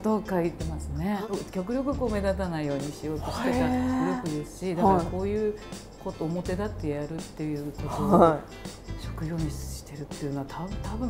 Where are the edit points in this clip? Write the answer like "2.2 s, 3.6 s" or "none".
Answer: 1.1 s

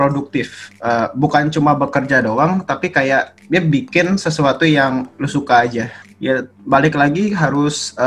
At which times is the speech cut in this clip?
6.0 s

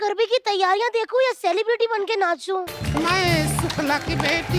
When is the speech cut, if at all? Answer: 2.7 s

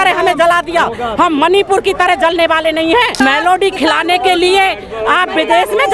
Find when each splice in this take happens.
3.2 s

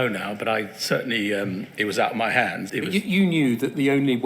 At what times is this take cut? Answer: 2.6 s

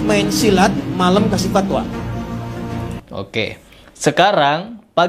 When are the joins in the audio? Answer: 3.0 s

